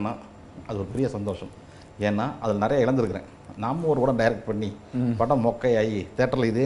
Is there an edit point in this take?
no; 0 cuts

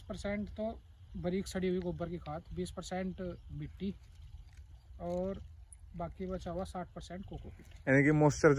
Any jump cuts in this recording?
no; 0 cuts

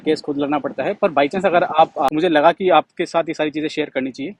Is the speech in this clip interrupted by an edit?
yes; 1 cut; at 2.1 s

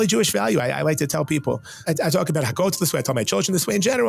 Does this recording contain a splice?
yes; 1 cut; at 1.8 s

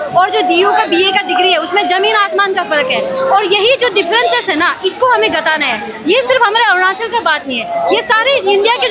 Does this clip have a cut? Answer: no; 0 cuts

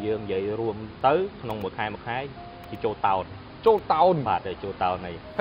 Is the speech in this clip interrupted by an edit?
yes; 1 cut; at 0.9 s

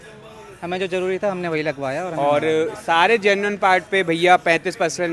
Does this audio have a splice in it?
no; 0 cuts

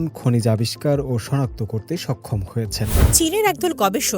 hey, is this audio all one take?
no; 1 cut; at 3.1 s

